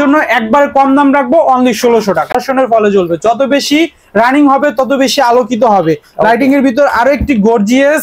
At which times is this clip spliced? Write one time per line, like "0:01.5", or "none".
0:02.4